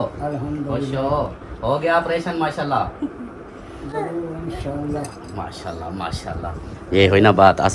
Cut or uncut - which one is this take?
uncut